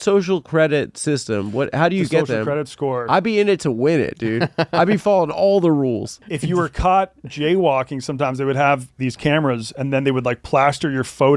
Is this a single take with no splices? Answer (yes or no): no